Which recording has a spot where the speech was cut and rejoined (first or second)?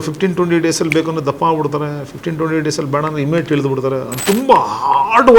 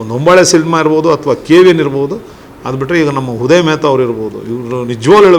first